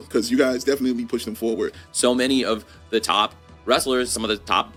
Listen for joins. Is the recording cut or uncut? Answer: uncut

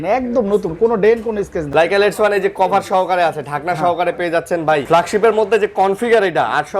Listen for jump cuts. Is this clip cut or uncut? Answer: cut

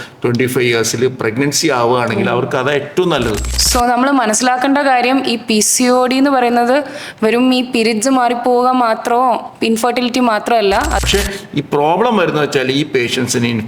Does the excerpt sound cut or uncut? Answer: cut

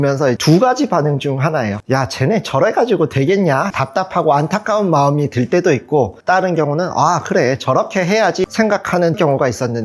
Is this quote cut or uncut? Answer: uncut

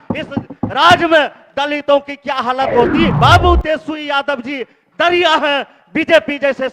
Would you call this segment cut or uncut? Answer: cut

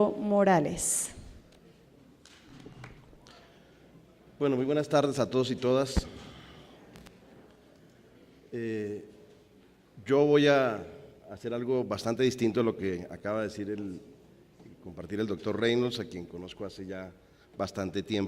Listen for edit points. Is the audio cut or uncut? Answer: cut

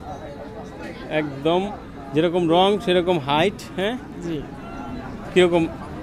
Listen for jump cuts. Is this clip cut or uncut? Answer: uncut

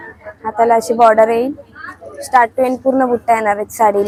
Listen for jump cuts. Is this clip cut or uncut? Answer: uncut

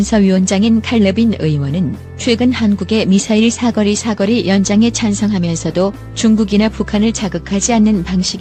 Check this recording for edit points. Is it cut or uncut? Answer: uncut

